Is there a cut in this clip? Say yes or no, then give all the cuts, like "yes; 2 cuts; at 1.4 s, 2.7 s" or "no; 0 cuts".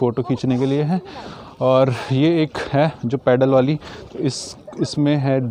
no; 0 cuts